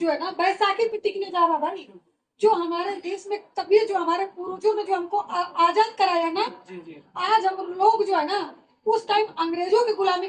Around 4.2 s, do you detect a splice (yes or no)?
no